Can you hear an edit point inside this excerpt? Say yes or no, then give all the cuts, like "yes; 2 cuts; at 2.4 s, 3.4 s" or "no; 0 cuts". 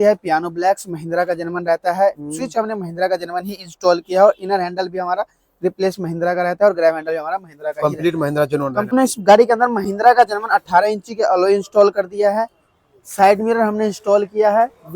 yes; 1 cut; at 8.9 s